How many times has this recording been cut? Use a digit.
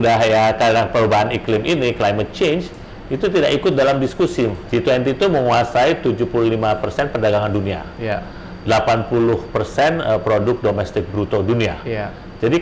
1